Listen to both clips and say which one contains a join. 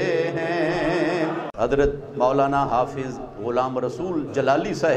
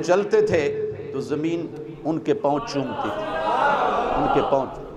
first; 1 cut; at 1.5 s

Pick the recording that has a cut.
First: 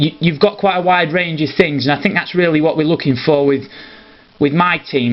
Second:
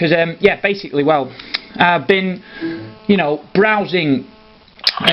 first; 1 cut; at 2.2 s

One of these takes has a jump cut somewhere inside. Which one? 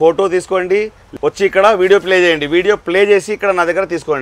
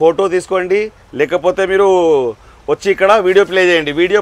first; 1 cut; at 1.0 s

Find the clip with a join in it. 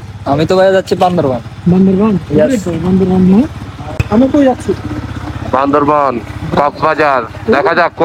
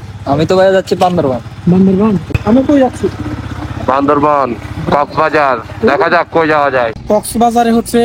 second; 2 cuts; at 2.2 s, 7.0 s

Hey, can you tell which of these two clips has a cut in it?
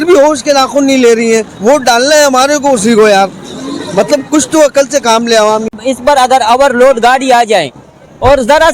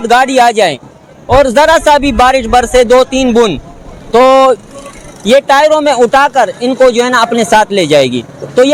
first; 1 cut; at 5.7 s

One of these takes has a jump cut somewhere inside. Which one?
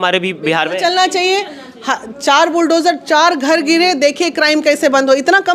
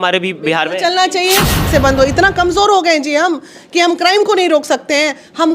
second; 1 cut; at 1.7 s

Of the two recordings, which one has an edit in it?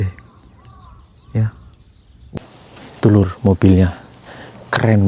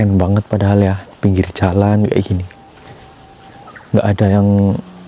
first; 1 cut; at 2.4 s

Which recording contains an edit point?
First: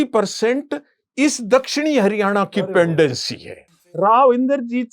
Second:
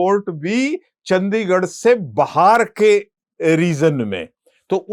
first; 1 cut; at 3.7 s

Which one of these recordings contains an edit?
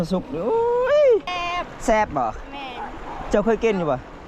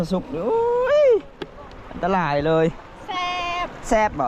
first; 1 cut; at 1.3 s

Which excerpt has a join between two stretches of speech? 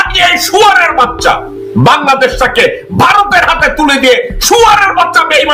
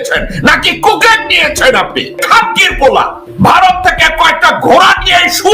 second; 2 cuts; at 2.2 s, 3.2 s

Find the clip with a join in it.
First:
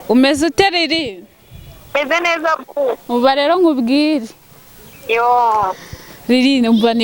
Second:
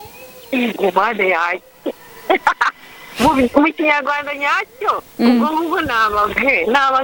first; 1 cut; at 3.0 s

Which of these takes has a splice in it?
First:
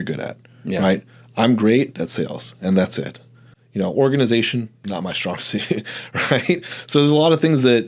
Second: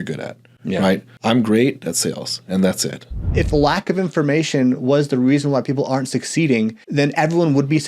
second; 3 cuts; at 1.1 s, 3.3 s, 6.8 s

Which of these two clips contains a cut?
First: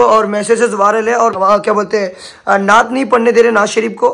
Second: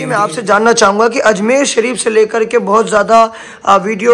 first; 1 cut; at 1.4 s

